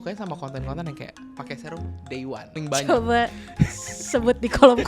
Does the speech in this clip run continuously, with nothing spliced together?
no; 1 cut; at 2.6 s

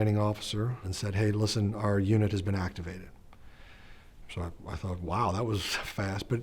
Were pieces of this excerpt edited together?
yes; 1 cut; at 0.9 s

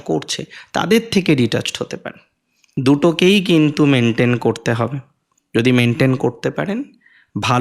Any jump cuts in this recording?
yes; 1 cut; at 2.6 s

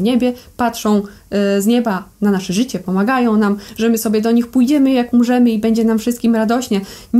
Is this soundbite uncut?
yes; 0 cuts

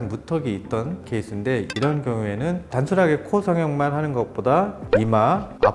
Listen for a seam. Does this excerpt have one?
yes; 1 cut; at 1.1 s

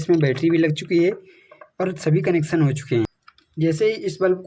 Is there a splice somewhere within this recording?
yes; 1 cut; at 3.2 s

